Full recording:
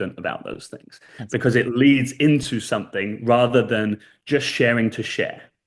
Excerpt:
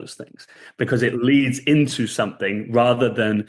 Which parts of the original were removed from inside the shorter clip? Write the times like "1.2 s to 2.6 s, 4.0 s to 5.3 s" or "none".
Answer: none